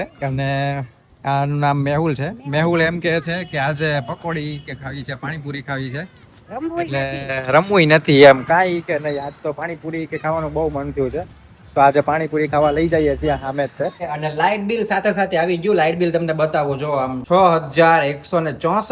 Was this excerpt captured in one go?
no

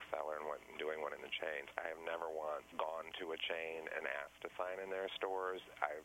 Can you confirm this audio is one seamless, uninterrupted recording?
no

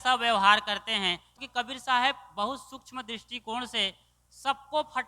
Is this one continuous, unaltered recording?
no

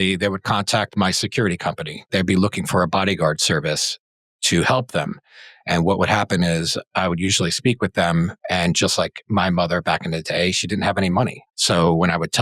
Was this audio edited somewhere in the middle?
yes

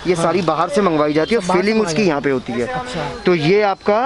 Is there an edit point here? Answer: no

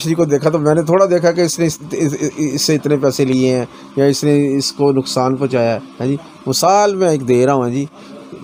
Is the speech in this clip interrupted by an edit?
no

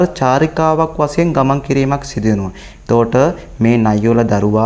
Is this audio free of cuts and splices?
yes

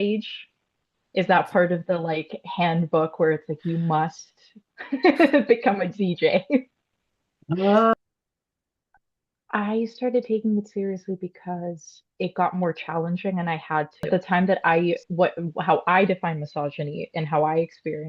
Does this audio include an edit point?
yes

